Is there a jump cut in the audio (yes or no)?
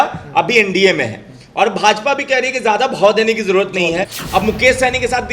yes